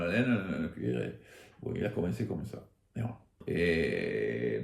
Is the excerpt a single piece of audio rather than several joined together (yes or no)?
no